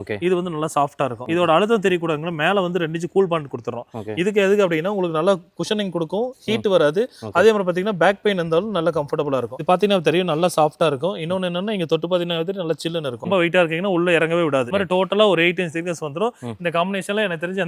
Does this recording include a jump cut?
yes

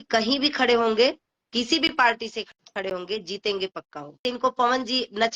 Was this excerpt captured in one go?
no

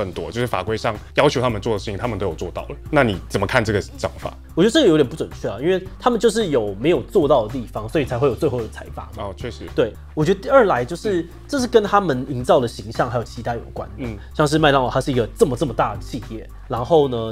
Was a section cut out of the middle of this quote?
no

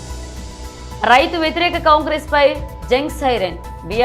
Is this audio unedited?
no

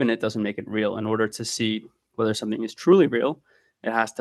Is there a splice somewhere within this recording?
no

